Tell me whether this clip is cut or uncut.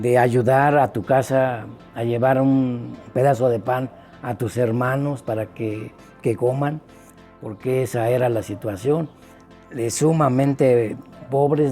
uncut